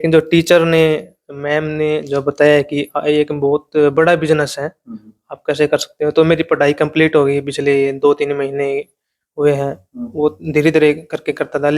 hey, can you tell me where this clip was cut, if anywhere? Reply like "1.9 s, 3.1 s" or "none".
none